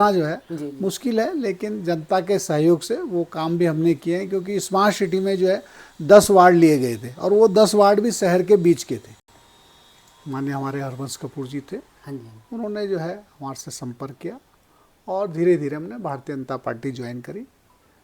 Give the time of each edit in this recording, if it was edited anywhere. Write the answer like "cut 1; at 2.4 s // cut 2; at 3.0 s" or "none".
cut 1; at 9.2 s